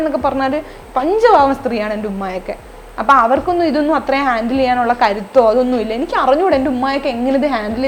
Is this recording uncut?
yes; 0 cuts

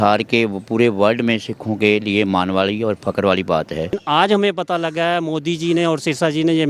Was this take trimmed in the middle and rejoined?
yes; 1 cut; at 4.0 s

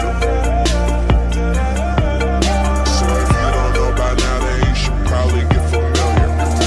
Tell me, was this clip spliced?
no; 0 cuts

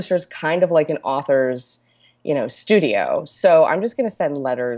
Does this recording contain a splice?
no; 0 cuts

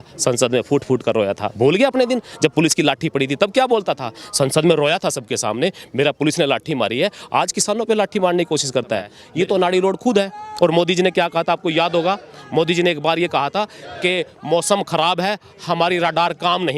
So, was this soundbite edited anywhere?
yes; 1 cut; at 9.2 s

